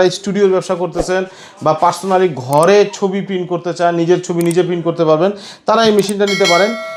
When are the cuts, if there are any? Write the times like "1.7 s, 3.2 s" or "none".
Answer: none